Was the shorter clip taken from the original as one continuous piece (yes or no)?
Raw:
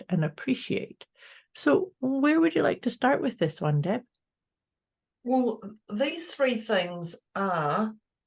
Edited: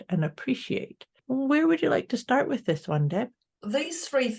no